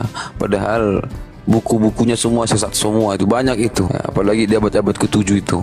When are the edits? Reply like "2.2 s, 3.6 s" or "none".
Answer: 3.9 s